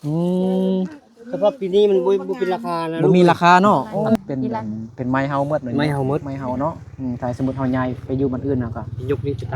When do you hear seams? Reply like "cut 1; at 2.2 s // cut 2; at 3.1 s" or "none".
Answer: cut 1; at 4.2 s